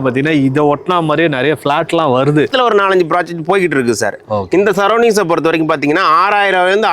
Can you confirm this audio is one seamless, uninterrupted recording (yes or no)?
no